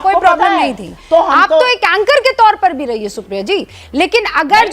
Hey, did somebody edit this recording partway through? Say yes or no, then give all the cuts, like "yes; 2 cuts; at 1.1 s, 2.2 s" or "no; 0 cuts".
yes; 1 cut; at 0.9 s